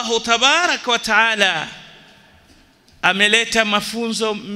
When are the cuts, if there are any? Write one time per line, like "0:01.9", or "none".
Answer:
none